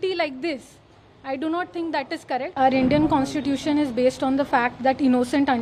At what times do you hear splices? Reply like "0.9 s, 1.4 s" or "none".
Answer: 2.5 s